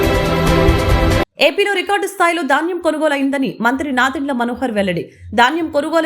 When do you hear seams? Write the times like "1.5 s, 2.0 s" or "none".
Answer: 1.2 s

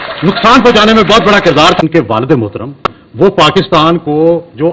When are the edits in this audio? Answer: 1.8 s

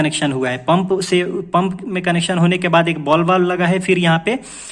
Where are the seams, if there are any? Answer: none

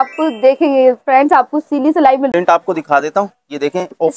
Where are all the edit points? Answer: 2.3 s

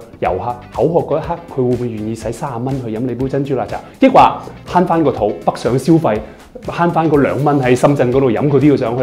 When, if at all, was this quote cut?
none

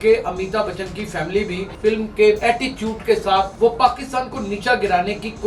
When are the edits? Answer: 1.7 s, 2.4 s, 3.5 s

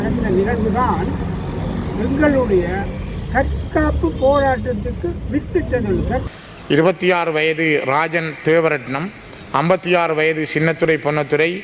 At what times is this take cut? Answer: 6.3 s

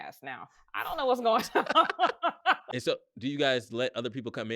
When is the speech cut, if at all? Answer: 2.6 s

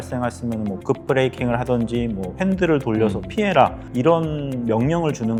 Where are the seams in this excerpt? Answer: none

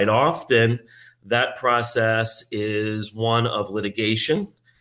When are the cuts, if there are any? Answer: none

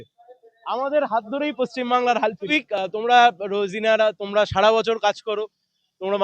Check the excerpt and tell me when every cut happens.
2.5 s

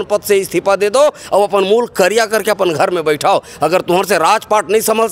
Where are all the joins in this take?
none

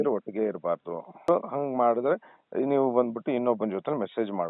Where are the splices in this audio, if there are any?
1.2 s

